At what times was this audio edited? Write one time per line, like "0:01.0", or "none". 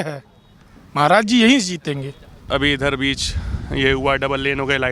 0:02.4